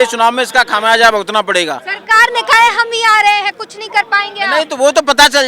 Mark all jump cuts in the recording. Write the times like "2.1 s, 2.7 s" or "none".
none